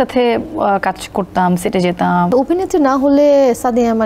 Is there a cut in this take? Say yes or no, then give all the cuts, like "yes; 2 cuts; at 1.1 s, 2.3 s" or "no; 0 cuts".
yes; 1 cut; at 2.3 s